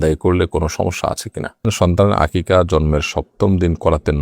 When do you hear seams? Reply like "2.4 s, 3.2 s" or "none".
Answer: 1.7 s